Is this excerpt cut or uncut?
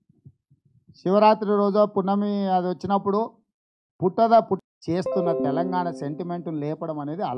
cut